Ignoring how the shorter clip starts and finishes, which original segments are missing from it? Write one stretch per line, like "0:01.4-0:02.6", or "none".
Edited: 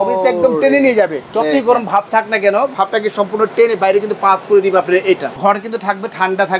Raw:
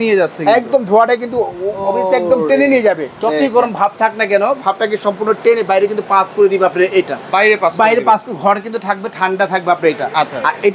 0:07.2-0:08.3